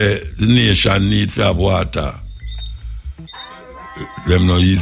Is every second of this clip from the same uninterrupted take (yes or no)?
no